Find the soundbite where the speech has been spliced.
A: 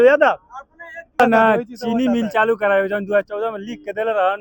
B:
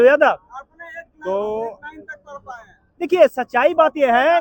A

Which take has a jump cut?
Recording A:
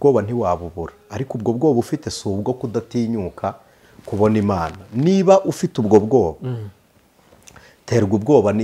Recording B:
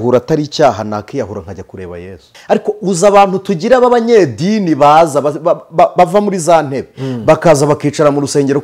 B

